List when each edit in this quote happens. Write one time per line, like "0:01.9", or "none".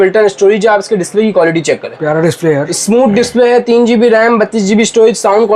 none